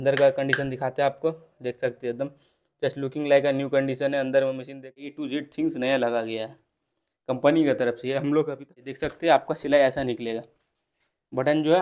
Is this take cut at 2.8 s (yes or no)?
no